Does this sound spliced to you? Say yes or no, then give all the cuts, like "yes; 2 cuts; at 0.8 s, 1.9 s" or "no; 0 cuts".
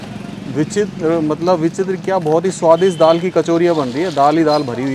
no; 0 cuts